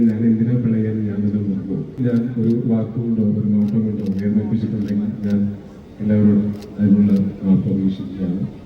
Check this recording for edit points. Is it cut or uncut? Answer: cut